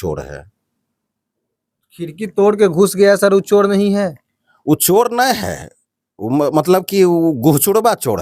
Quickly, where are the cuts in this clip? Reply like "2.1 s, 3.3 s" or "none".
none